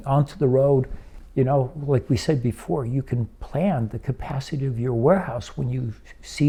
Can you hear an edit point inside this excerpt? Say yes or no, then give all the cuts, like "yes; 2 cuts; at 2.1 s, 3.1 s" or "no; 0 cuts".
no; 0 cuts